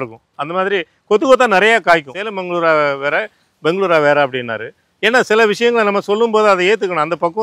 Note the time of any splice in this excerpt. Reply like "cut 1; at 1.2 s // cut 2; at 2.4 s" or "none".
cut 1; at 2.1 s